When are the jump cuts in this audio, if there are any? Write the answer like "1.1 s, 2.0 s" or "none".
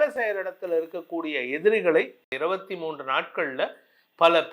2.2 s